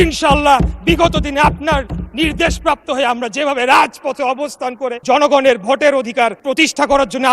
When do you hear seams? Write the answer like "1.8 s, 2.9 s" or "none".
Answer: 5.0 s, 6.4 s

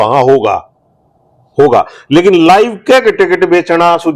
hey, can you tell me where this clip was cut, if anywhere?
none

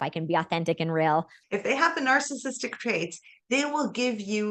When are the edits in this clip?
1.4 s

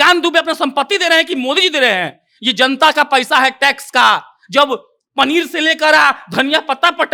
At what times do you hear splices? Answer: none

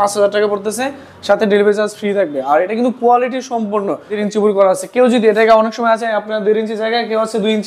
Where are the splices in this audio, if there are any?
4.2 s

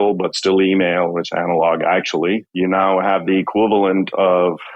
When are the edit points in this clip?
2.5 s

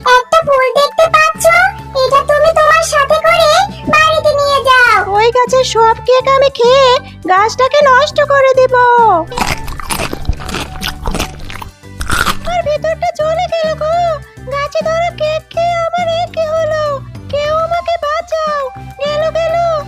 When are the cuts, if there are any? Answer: 5.1 s, 9.3 s, 12.4 s

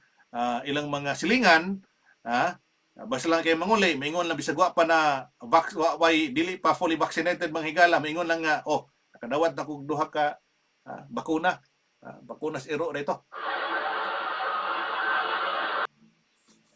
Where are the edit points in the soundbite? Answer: 15.9 s

